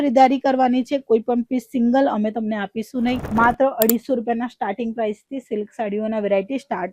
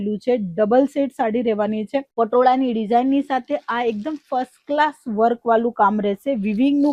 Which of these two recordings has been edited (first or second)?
first